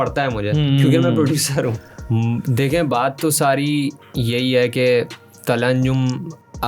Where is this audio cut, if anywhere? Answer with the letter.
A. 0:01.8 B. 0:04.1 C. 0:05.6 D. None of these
A